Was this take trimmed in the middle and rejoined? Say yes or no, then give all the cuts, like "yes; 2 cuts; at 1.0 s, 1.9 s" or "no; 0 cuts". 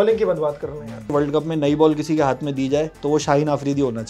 yes; 2 cuts; at 1.1 s, 2.9 s